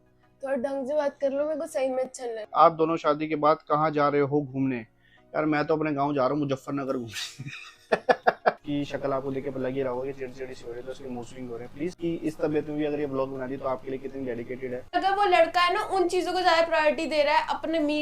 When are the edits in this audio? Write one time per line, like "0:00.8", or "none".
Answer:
0:02.5
0:08.6
0:12.0
0:14.9